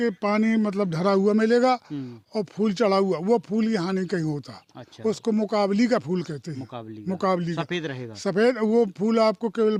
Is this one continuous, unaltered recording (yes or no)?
yes